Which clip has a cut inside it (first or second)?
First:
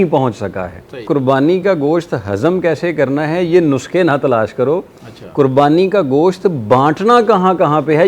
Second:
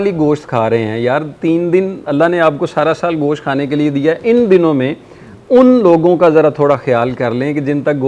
first